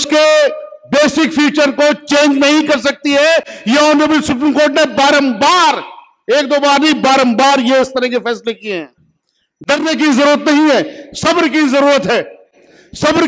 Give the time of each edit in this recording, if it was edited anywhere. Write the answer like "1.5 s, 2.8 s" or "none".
none